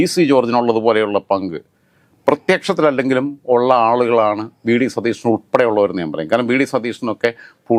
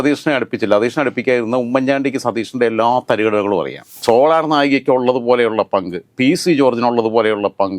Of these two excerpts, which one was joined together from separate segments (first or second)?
second